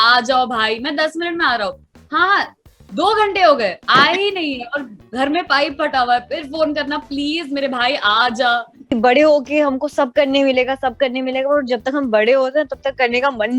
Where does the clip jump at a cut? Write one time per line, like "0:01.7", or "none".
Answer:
0:08.9